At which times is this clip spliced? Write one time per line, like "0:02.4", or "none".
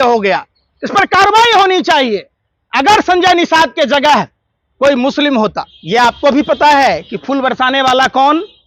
0:05.7